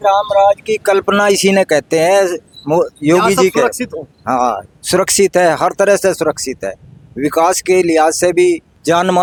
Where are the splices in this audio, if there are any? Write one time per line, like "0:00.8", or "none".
none